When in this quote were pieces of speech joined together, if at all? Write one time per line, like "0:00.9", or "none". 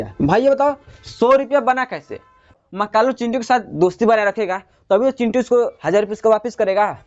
0:02.5